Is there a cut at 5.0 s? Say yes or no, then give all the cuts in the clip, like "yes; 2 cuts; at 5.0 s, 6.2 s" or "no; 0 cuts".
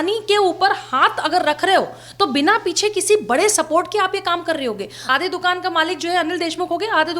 yes; 1 cut; at 5.0 s